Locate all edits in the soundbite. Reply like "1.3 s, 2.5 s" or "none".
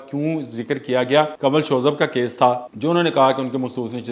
1.3 s, 2.7 s